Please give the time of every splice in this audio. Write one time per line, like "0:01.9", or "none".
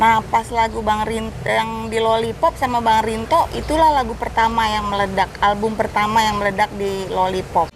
none